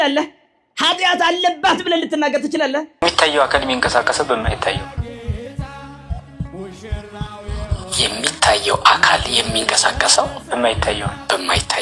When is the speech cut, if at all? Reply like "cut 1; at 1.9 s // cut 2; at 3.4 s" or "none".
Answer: cut 1; at 3.0 s